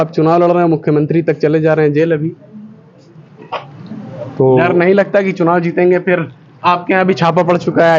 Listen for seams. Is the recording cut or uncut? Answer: uncut